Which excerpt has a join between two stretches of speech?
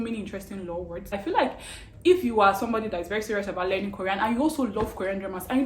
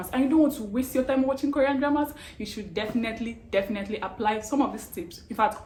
first; 1 cut; at 1.1 s

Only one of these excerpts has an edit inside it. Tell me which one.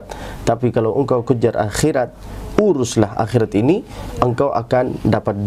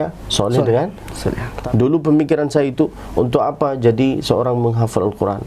second; 1 cut; at 1.5 s

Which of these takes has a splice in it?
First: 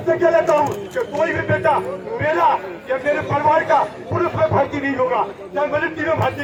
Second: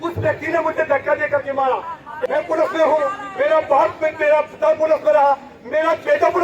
second; 1 cut; at 2.0 s

